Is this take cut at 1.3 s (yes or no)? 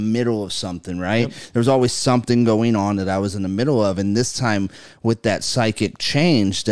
no